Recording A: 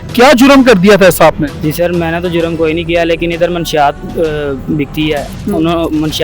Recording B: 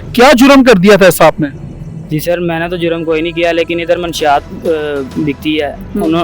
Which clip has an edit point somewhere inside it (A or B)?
A